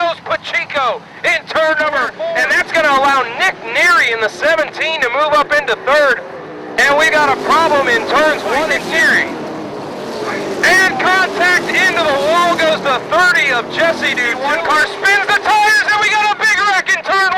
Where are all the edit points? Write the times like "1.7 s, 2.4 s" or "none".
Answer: 2.2 s, 8.8 s, 14.3 s